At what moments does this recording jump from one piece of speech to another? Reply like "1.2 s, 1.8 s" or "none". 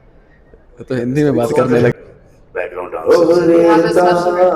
1.9 s